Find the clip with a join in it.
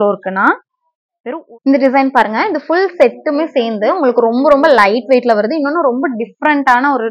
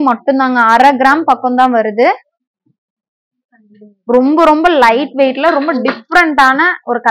first; 1 cut; at 1.2 s

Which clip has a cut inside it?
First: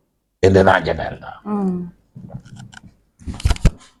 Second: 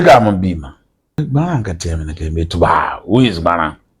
second; 1 cut; at 1.2 s

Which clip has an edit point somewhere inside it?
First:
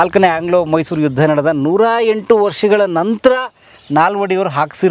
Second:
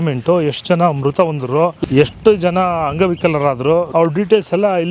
second; 2 cuts; at 1.8 s, 3.9 s

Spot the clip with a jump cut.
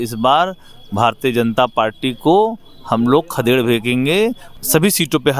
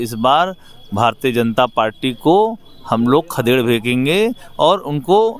first; 1 cut; at 4.4 s

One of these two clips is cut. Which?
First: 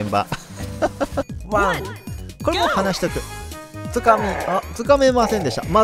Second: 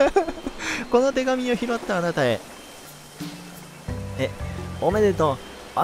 first; 1 cut; at 1.3 s

